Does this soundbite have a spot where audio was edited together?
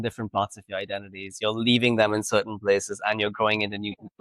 no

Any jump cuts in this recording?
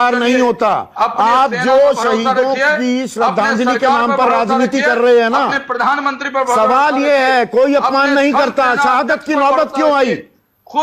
no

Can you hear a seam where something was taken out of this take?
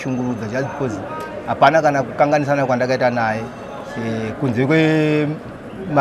no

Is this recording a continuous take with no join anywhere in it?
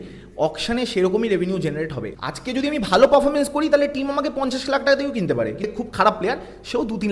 no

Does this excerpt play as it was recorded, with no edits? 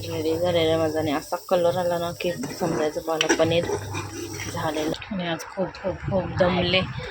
no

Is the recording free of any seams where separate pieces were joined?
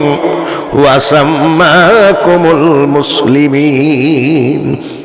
yes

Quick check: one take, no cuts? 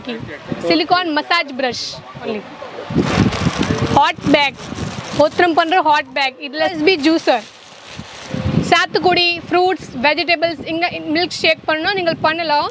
no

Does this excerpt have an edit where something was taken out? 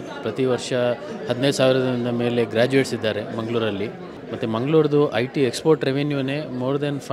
no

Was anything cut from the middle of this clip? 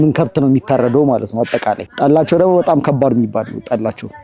yes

